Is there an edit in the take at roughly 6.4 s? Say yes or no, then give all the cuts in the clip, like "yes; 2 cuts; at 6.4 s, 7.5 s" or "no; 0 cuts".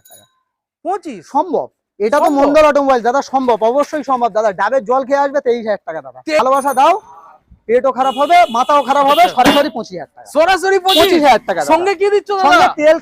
yes; 1 cut; at 6.4 s